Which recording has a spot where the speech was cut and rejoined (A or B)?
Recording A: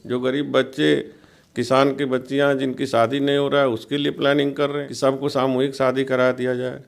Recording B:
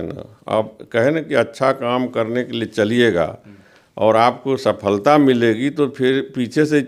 A